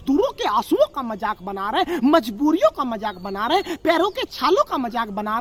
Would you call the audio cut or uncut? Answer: uncut